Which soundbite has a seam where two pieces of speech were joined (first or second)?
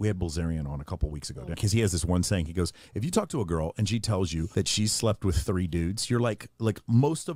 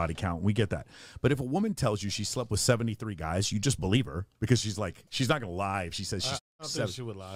first